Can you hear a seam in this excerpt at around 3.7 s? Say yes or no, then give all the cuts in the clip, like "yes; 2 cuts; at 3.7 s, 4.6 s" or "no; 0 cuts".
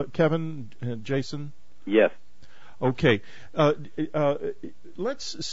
no; 0 cuts